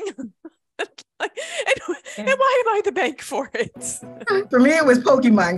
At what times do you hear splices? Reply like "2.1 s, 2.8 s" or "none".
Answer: 4.5 s